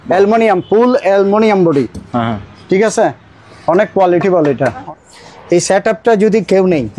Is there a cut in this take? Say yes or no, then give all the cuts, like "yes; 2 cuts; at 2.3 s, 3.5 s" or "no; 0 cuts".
yes; 1 cut; at 4.8 s